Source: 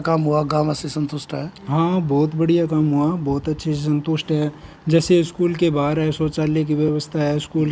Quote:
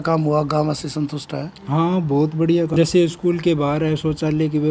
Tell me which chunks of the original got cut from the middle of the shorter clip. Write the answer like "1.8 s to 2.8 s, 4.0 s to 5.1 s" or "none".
2.7 s to 4.9 s

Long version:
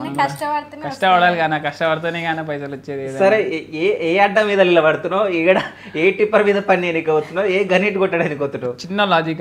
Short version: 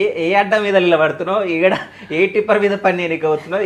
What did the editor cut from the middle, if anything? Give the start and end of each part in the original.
none

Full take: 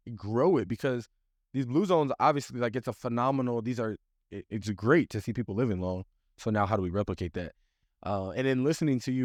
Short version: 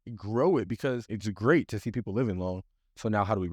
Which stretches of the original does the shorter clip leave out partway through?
1.1 s to 4.5 s

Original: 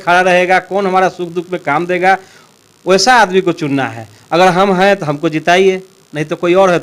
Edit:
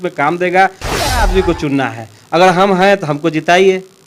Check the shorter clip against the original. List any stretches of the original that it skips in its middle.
2.8 s to 3.3 s

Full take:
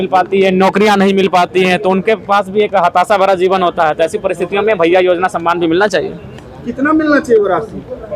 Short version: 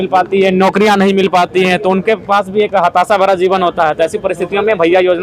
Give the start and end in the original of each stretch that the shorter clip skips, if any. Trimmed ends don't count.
none

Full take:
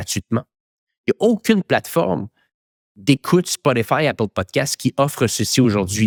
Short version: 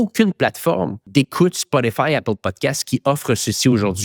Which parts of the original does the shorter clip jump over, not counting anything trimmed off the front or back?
2.3 s to 2.9 s

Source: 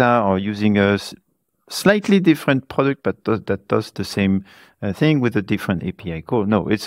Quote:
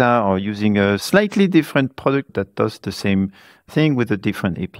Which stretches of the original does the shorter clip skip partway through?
1.0 s to 1.8 s, 3.0 s to 3.4 s, 4.8 s to 4.9 s

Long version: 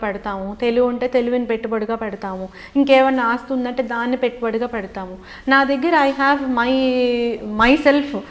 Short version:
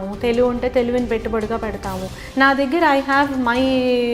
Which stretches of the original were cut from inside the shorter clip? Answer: 2.5 s to 5.2 s

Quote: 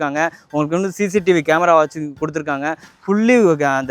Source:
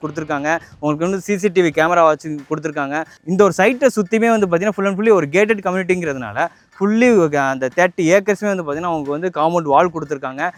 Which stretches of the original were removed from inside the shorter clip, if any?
3.2 s to 6.6 s

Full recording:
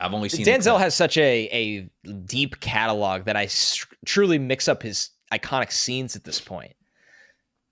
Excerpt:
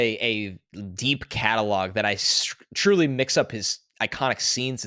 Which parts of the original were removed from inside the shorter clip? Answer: none

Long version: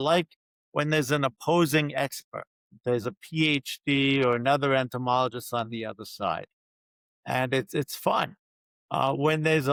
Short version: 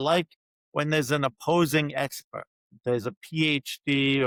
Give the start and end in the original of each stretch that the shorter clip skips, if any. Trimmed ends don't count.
none

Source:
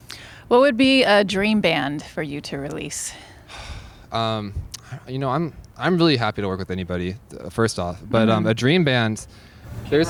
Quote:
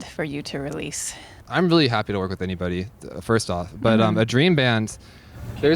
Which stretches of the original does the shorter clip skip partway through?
3.3 s to 5.6 s

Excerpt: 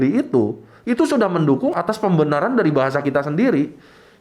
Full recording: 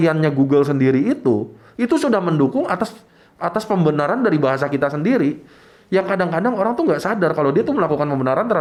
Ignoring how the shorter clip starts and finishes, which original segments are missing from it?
2.7 s to 3.4 s

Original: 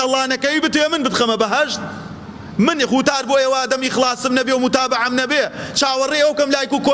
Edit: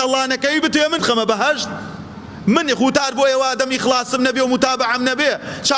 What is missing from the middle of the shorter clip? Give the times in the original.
1.0 s to 1.1 s

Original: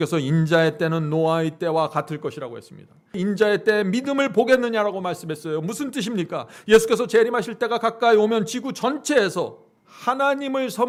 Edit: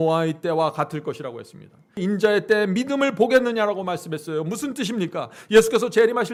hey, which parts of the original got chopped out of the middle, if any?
none

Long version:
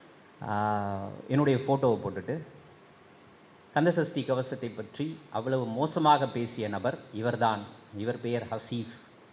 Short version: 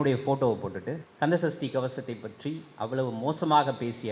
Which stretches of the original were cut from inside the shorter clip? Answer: 2.5 s to 3.6 s

